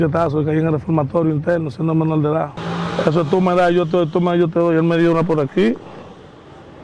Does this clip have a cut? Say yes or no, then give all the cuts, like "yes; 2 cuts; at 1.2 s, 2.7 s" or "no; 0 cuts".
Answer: yes; 1 cut; at 2.6 s